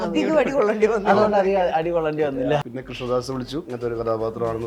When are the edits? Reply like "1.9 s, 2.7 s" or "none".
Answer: 2.3 s, 3.7 s

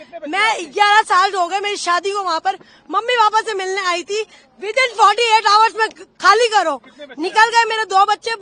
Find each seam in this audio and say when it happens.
none

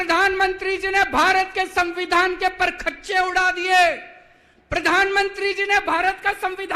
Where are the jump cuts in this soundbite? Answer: none

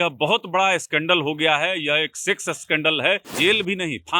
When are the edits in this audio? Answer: 3.3 s

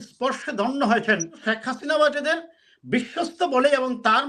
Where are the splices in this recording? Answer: 1.4 s

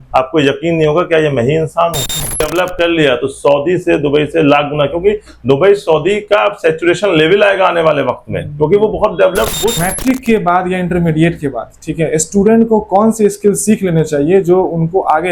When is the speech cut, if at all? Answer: 2.4 s, 9.7 s

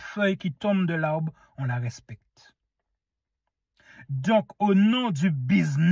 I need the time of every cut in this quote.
none

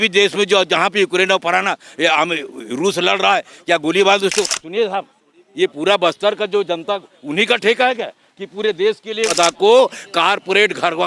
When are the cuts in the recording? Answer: 4.4 s, 9.3 s

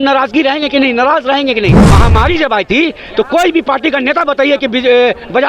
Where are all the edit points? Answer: 1.8 s

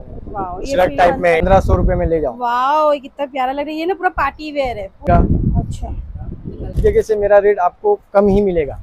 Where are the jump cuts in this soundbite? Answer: 1.4 s, 5.1 s, 6.7 s

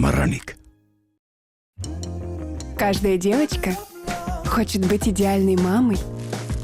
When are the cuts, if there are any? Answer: none

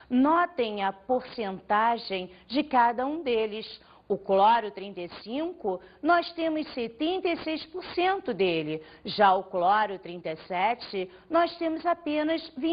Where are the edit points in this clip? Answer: none

